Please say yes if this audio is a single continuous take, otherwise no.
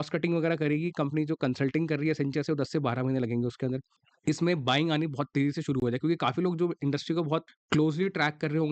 no